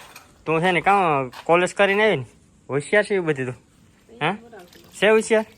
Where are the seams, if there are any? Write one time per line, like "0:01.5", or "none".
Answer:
none